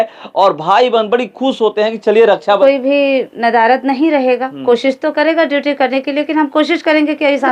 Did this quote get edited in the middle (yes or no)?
yes